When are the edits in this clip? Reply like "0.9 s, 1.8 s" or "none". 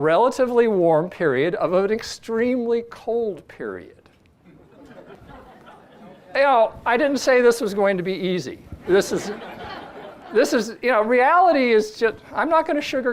none